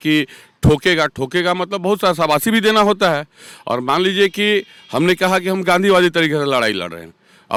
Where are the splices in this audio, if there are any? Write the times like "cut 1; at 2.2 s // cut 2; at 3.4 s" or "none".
none

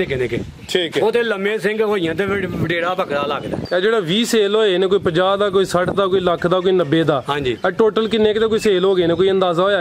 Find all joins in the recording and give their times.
cut 1; at 3.6 s

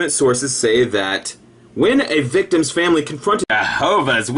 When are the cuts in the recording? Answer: none

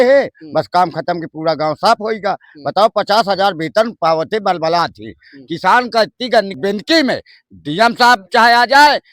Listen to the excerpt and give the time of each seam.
cut 1; at 6.5 s

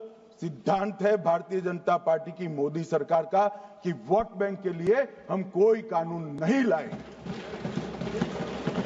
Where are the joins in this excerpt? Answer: none

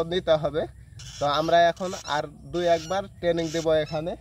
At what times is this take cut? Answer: none

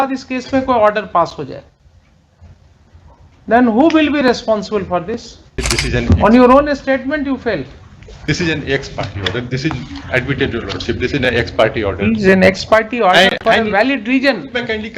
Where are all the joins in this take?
cut 1; at 5.5 s

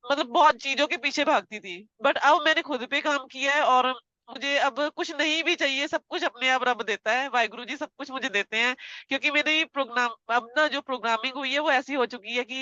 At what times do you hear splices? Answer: none

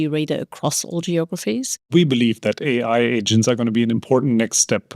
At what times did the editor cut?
cut 1; at 1.9 s

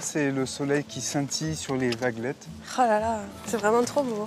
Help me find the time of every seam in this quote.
cut 1; at 3.3 s

